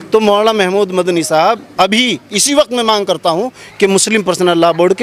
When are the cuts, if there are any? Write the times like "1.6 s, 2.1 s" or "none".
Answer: none